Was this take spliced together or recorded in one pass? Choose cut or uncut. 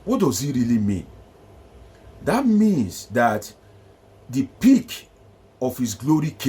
uncut